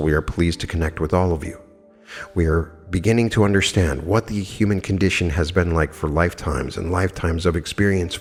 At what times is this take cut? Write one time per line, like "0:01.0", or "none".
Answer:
none